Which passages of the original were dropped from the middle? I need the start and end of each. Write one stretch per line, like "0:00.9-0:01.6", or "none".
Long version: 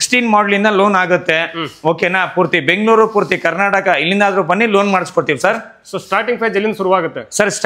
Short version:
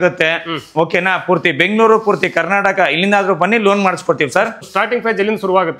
0:05.7-0:06.0